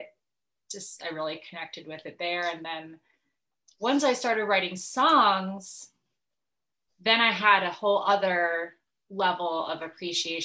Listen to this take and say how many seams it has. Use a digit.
0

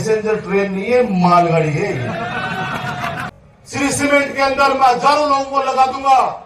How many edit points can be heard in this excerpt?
1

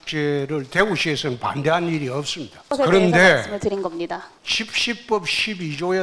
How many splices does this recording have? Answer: 2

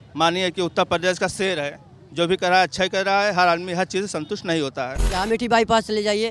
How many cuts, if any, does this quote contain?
1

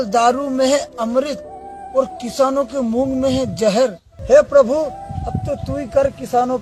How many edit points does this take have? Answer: 1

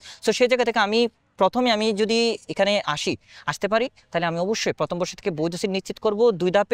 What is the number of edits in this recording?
0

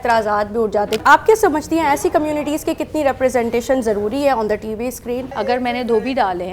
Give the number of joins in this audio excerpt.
2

